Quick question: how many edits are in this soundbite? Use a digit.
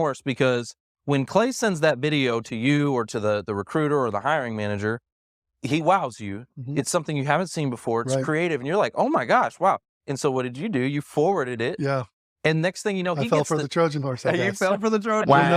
0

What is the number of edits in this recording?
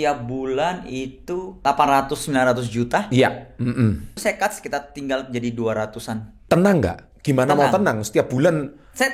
3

